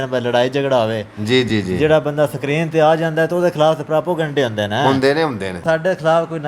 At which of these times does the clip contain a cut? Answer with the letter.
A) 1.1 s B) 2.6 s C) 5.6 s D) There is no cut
C